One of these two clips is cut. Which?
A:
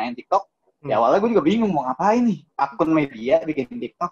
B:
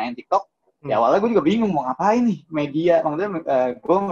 A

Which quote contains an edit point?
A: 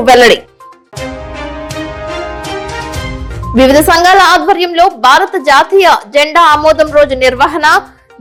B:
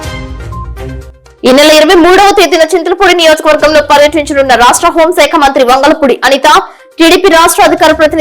B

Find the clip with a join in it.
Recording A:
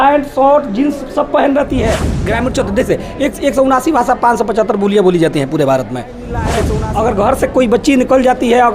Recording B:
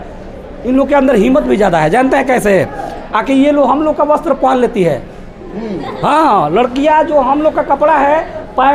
A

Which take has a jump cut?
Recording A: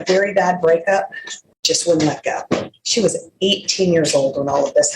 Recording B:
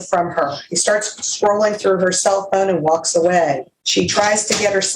B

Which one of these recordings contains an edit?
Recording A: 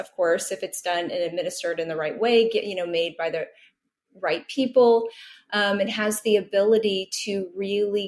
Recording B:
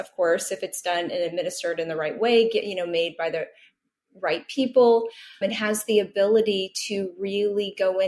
B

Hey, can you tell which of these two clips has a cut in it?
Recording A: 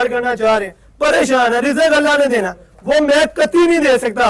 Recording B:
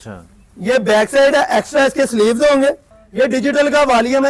B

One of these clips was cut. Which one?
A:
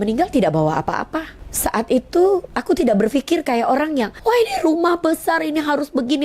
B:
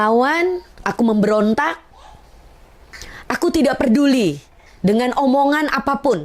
A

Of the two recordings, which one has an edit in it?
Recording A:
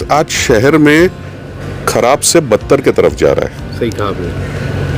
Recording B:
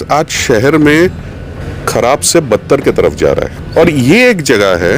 B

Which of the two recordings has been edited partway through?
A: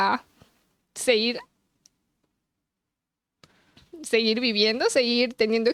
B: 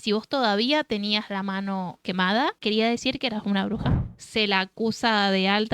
B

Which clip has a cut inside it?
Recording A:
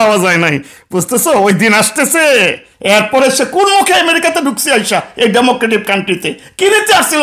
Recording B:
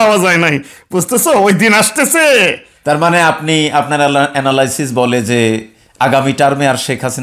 A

